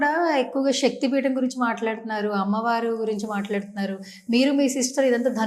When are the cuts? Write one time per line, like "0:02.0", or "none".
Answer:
none